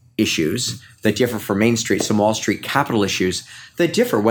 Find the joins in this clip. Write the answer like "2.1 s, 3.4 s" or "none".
none